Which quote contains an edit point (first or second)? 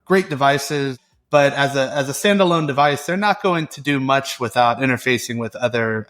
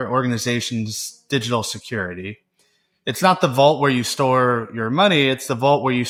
first